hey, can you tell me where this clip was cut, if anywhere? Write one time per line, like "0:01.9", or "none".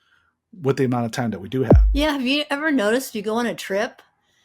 0:01.8